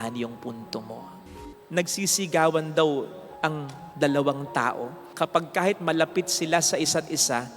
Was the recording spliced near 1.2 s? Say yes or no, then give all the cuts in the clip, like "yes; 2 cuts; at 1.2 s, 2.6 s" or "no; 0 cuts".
yes; 1 cut; at 1.2 s